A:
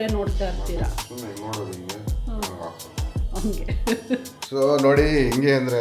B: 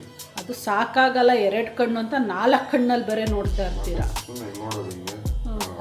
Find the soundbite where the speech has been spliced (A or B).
A